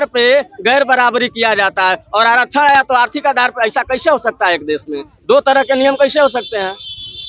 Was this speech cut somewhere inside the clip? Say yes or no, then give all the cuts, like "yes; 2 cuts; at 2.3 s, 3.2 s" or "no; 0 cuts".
no; 0 cuts